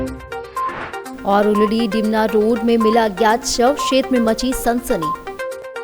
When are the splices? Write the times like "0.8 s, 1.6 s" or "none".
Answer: 1.1 s